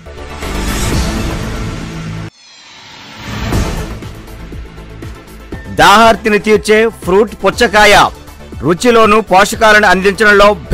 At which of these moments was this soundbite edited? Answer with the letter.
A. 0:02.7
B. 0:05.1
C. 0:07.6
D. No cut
D